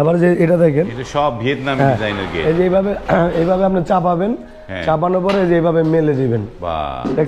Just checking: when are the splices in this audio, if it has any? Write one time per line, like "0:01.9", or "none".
none